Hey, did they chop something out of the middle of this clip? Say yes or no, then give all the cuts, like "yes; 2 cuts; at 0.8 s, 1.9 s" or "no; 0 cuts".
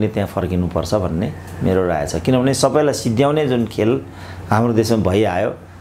no; 0 cuts